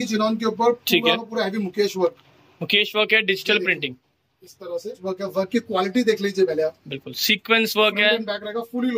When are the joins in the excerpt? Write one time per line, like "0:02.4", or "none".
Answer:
0:05.0